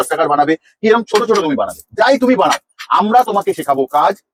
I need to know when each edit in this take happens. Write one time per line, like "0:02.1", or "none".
none